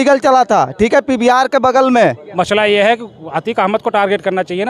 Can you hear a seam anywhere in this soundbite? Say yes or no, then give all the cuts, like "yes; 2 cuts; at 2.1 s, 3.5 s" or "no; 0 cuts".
yes; 1 cut; at 2.2 s